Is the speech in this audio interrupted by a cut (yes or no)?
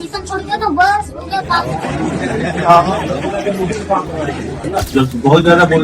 yes